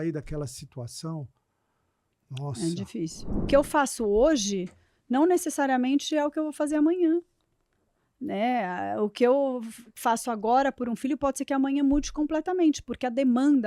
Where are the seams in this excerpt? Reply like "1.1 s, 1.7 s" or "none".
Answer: 3.5 s